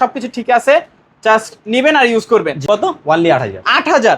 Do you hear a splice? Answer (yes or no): yes